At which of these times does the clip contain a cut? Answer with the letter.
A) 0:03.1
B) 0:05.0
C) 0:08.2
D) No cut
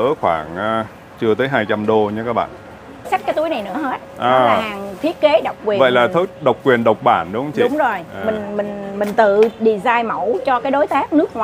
A